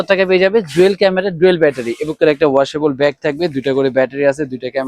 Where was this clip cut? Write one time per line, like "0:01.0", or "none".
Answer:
0:02.1

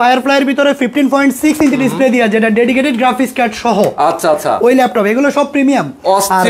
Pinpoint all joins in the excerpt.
none

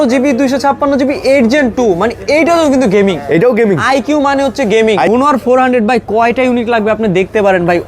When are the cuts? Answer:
0:05.1

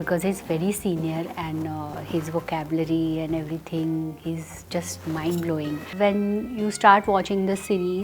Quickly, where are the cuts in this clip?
0:05.9

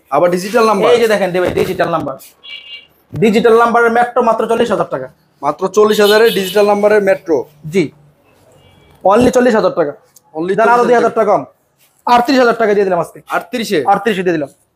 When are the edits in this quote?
none

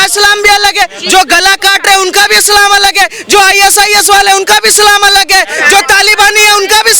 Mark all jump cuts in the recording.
none

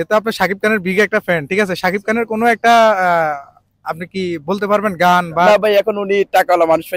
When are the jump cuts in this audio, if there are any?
0:05.5

